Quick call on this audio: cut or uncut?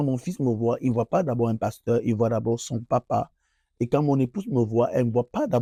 uncut